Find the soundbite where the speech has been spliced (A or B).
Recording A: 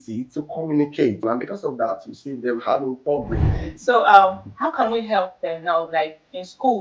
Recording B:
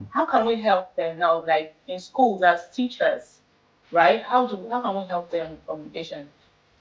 A